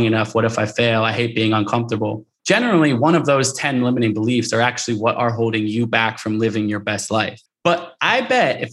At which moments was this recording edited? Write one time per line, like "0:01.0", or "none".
0:02.3
0:07.4